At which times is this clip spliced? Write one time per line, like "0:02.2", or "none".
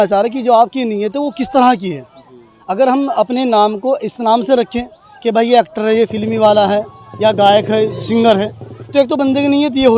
none